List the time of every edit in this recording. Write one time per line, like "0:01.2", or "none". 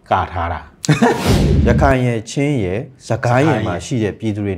0:01.4